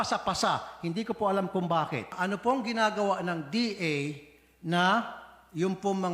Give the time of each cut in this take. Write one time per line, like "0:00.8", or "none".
0:02.2